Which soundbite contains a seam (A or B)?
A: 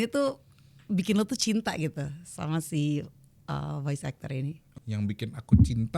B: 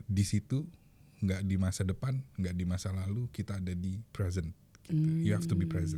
A